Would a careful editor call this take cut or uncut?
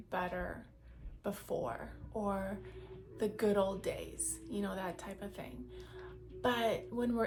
uncut